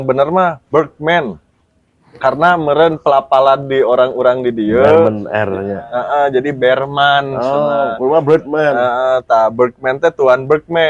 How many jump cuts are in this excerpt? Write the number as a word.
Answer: zero